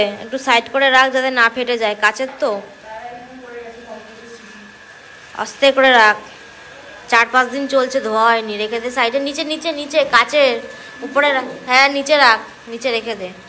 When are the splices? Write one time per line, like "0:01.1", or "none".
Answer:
none